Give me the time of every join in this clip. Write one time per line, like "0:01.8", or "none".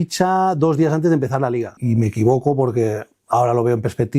0:01.7